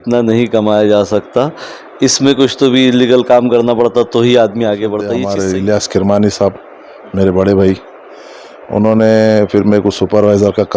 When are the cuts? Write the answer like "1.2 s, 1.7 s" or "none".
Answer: 5.2 s